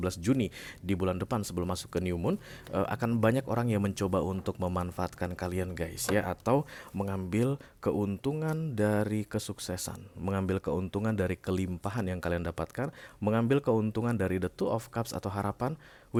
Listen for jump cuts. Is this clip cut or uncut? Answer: uncut